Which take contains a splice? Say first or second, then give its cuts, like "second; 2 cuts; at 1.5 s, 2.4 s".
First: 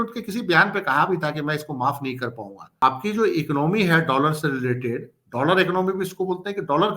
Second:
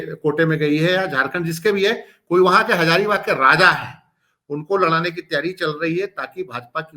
first; 1 cut; at 2.8 s